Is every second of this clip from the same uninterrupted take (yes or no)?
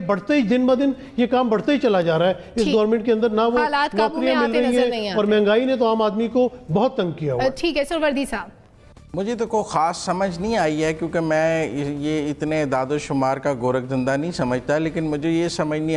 yes